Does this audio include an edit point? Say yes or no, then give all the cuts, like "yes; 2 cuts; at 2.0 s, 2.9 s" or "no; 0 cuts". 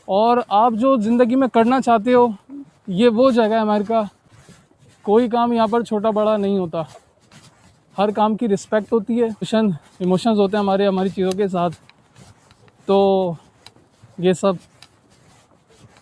yes; 2 cuts; at 4.2 s, 9.5 s